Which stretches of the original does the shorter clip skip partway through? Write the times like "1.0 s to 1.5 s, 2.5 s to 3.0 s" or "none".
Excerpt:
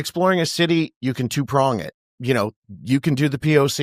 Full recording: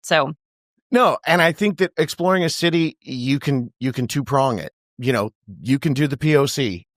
3.0 s to 3.7 s